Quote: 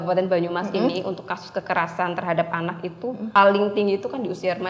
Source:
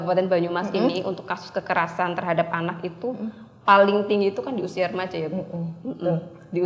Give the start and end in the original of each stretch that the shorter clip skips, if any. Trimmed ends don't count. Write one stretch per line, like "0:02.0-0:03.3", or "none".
0:03.3-0:03.6